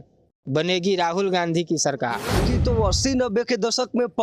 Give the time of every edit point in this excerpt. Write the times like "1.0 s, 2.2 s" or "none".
2.4 s